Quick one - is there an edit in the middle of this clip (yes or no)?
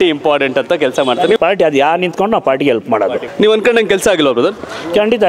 yes